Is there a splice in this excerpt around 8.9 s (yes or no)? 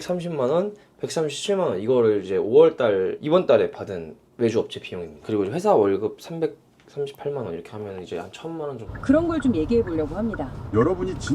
yes